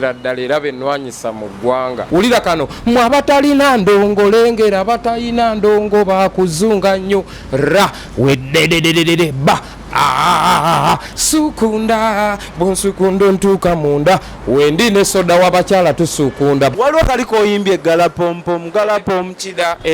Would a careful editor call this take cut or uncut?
cut